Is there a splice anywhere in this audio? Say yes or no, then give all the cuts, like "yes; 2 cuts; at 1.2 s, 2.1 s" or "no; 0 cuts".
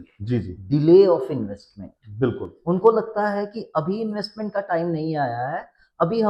no; 0 cuts